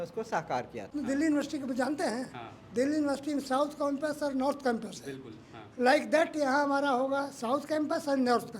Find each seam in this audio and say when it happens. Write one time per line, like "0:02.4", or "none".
0:00.9